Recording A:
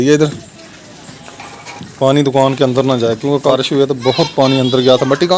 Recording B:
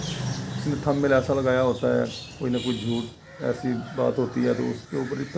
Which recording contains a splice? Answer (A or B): A